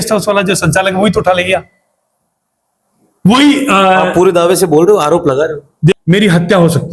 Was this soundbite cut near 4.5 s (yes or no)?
no